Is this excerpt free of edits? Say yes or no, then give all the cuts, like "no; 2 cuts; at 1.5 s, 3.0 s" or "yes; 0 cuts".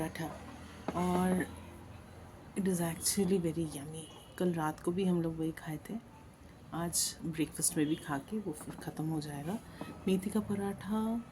yes; 0 cuts